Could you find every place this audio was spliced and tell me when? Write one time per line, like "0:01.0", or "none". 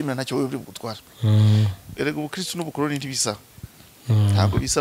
0:01.8